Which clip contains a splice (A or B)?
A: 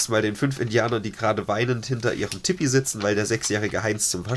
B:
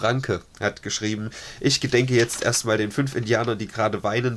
B